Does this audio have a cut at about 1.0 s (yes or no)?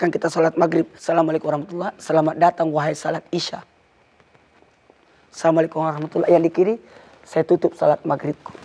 yes